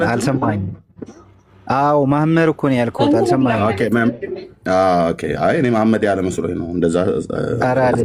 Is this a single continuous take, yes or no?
yes